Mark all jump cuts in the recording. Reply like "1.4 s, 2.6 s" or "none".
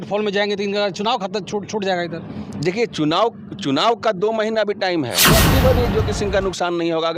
5.3 s